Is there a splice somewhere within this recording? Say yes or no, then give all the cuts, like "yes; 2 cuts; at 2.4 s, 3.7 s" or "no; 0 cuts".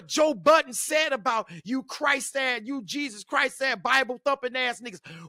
no; 0 cuts